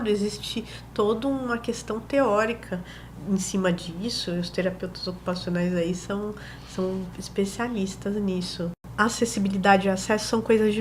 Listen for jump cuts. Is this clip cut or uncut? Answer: cut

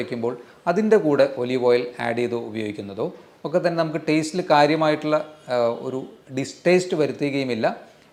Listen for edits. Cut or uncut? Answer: uncut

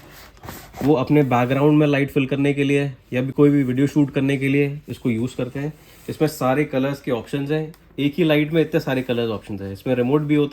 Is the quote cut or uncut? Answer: uncut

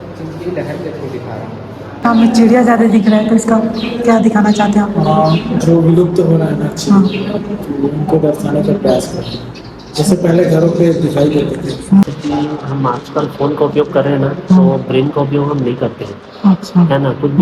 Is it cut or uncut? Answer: cut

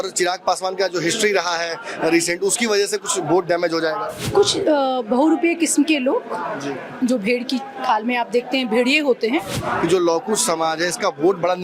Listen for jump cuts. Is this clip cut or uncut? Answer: cut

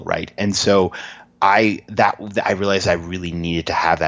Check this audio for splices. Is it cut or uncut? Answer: uncut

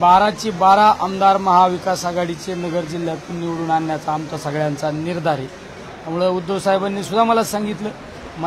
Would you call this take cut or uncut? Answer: uncut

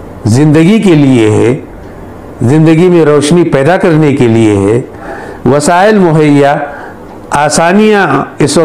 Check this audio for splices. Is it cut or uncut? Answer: uncut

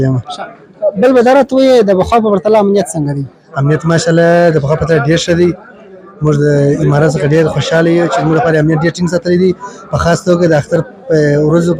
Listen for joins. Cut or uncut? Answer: uncut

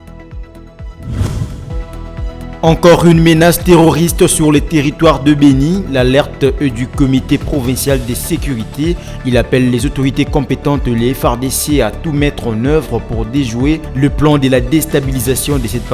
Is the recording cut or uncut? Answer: cut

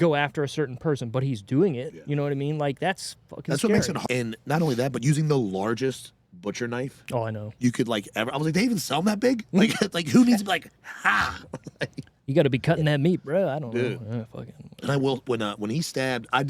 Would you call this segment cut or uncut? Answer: cut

